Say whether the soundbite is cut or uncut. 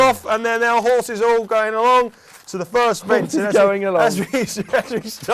cut